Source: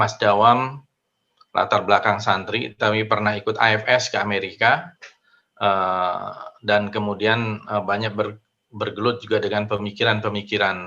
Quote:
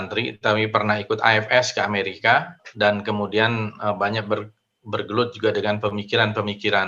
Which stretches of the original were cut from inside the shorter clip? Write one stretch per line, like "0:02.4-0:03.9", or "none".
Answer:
0:05.0-0:06.5